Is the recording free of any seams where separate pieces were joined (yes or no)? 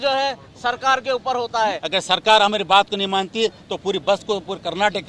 no